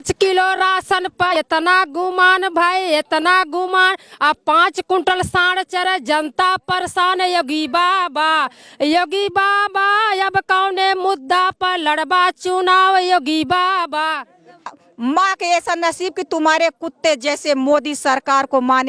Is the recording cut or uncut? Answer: cut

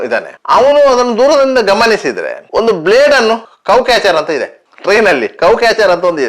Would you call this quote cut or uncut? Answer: uncut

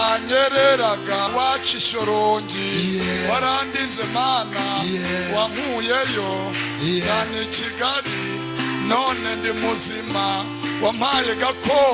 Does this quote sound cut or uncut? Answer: cut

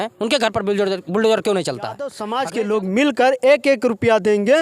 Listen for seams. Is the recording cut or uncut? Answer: cut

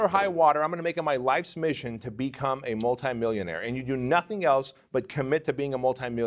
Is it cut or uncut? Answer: uncut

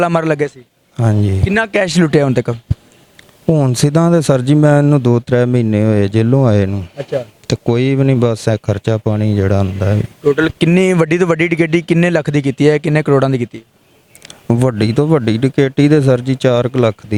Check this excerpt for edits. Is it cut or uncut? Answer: uncut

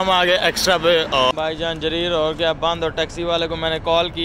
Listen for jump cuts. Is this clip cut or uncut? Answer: cut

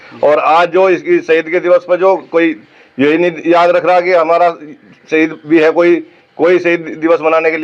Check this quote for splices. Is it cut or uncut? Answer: uncut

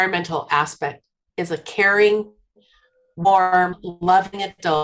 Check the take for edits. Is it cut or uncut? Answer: cut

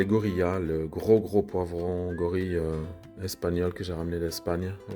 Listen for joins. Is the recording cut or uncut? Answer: uncut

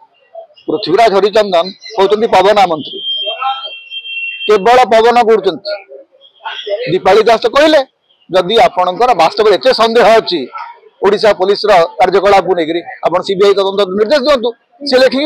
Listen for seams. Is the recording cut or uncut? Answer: uncut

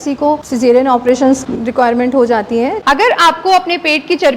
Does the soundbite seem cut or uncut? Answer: cut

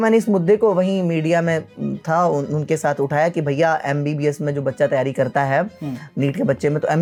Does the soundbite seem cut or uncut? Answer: uncut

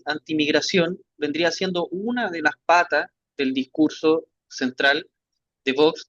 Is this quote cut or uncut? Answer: uncut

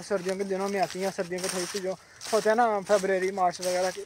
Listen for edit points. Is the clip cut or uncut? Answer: uncut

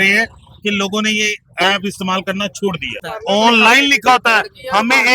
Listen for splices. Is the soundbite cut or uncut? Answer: cut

